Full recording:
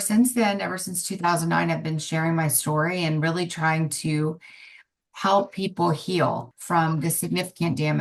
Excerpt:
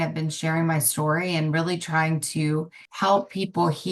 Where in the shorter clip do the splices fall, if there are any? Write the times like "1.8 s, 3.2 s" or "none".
2.8 s